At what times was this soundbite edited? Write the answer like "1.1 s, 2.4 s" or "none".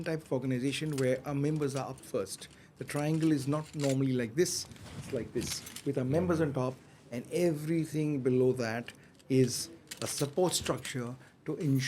none

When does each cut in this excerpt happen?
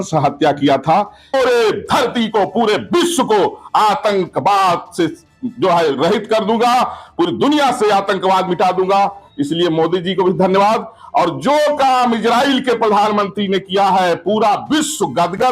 1.3 s

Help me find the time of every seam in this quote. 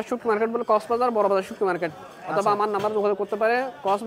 none

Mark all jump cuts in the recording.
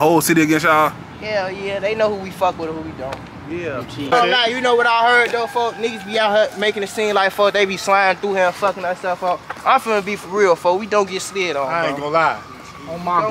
4.1 s

